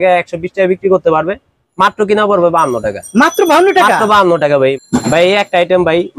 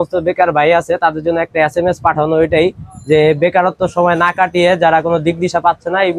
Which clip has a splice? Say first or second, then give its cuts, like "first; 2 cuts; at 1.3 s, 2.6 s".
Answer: first; 1 cut; at 5.0 s